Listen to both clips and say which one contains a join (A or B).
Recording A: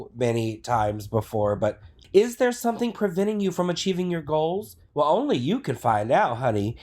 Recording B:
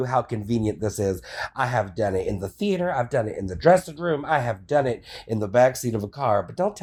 A